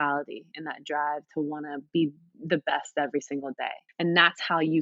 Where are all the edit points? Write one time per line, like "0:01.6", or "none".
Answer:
0:03.8